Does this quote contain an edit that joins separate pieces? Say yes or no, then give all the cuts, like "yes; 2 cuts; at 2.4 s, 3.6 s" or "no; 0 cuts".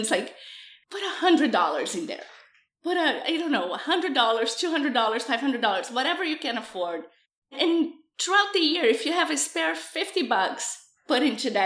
no; 0 cuts